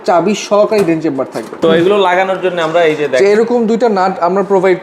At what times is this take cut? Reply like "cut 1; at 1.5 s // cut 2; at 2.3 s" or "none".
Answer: cut 1; at 1.5 s

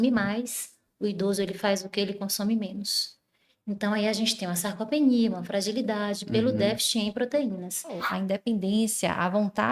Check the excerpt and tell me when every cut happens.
cut 1; at 8.1 s

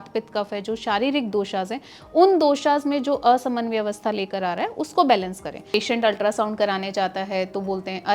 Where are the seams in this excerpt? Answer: cut 1; at 5.7 s

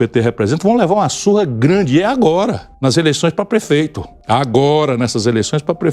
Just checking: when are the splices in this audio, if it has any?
cut 1; at 2.7 s // cut 2; at 4.1 s

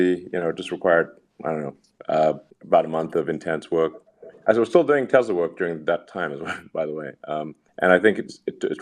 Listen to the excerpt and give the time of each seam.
none

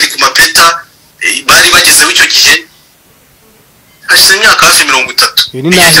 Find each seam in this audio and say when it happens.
none

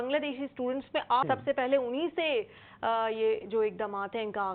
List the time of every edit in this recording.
cut 1; at 1.2 s

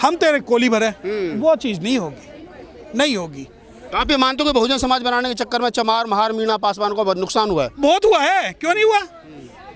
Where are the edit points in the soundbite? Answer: none

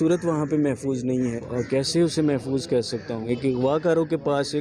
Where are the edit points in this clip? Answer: cut 1; at 1.4 s // cut 2; at 3.2 s

